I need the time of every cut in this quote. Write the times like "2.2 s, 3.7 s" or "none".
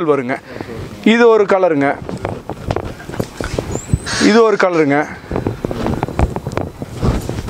none